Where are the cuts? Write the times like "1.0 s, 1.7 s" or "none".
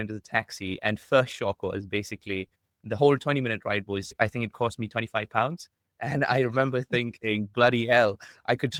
none